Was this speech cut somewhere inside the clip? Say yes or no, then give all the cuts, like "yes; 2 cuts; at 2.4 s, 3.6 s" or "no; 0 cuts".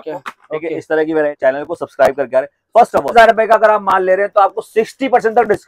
yes; 2 cuts; at 1.4 s, 3.1 s